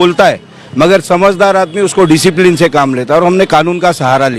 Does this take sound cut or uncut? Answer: uncut